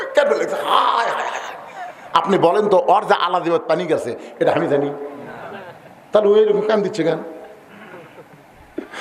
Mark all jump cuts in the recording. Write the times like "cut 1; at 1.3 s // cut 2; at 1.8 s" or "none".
none